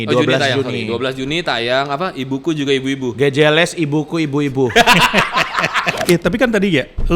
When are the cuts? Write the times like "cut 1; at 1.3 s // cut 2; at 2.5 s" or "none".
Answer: cut 1; at 6.0 s